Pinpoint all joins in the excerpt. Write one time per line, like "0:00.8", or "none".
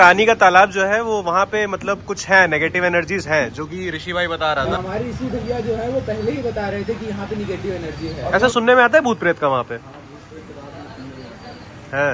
0:04.7
0:08.2